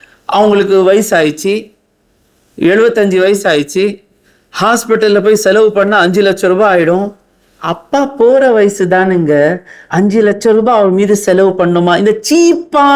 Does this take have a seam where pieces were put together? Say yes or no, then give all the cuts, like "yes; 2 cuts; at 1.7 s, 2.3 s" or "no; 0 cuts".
no; 0 cuts